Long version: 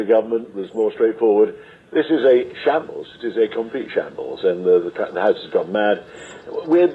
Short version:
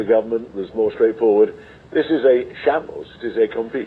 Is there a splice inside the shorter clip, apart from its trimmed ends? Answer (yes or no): no